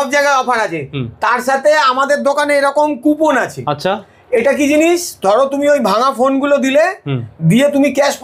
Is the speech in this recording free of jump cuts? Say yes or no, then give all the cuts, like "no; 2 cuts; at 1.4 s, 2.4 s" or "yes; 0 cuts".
yes; 0 cuts